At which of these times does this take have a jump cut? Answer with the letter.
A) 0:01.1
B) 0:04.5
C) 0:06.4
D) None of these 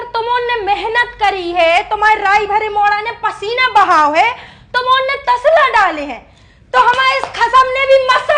D